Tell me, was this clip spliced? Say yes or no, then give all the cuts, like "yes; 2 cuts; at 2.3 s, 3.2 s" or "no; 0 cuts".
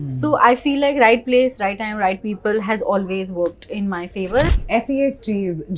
yes; 1 cut; at 4.5 s